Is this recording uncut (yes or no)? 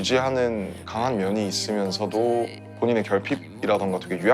no